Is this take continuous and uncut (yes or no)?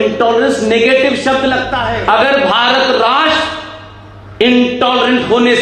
no